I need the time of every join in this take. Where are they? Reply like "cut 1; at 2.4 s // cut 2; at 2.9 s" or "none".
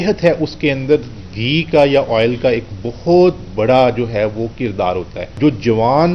cut 1; at 5.2 s

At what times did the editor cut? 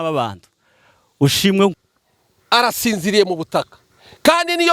cut 1; at 1.8 s

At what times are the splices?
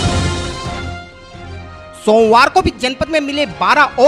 cut 1; at 0.9 s

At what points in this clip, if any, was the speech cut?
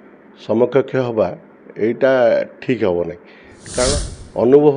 cut 1; at 3.8 s

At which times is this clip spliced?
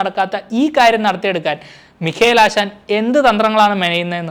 none

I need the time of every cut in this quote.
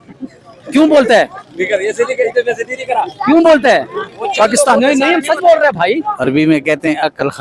cut 1; at 6.1 s

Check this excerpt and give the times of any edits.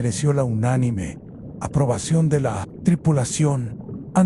cut 1; at 2.7 s

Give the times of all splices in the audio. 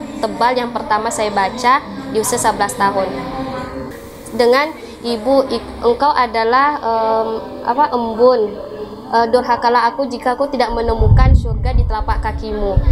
cut 1; at 3.9 s

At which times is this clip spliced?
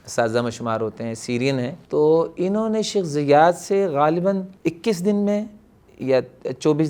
cut 1; at 1.8 s // cut 2; at 4.5 s

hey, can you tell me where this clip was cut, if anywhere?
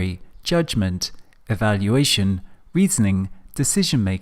cut 1; at 2.2 s

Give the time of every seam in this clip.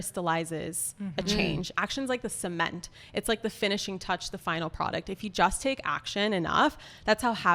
cut 1; at 1.7 s

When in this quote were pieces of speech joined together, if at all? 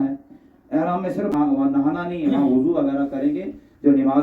cut 1; at 1.3 s

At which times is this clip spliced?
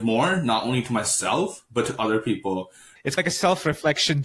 cut 1; at 2.9 s

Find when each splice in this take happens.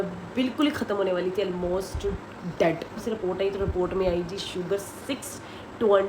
cut 1; at 3.0 s

